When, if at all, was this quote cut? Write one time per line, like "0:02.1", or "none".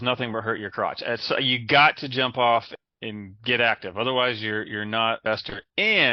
0:02.7
0:05.2